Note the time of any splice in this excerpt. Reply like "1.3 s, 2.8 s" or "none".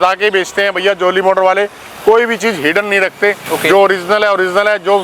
none